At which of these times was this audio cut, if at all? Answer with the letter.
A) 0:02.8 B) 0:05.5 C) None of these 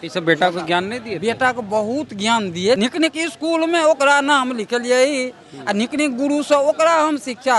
A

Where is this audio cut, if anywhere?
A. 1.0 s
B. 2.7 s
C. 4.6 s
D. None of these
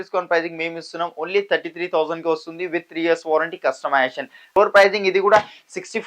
C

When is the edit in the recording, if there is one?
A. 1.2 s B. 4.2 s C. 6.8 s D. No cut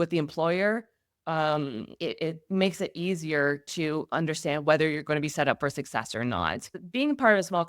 C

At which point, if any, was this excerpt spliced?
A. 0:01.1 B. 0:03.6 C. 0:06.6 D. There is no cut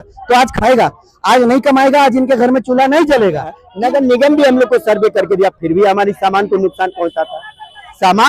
B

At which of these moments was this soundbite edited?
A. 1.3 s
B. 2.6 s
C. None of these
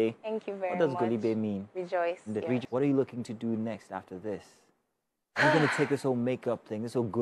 B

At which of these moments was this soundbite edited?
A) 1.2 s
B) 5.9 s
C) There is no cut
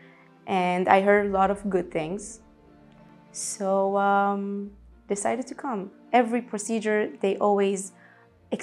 B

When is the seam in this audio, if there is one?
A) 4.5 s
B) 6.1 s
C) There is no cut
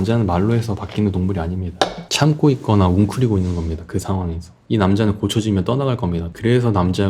A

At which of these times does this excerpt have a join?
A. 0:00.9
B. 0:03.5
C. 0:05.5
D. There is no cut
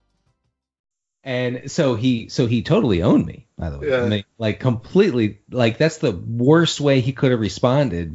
A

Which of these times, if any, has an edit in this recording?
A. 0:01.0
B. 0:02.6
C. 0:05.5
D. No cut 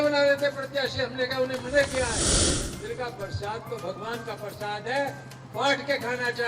B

